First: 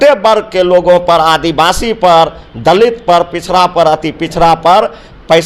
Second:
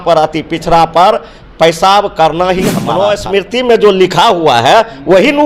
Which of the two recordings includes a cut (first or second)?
second